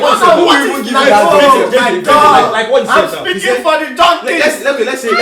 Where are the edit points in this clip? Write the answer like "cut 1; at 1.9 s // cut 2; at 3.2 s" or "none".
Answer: none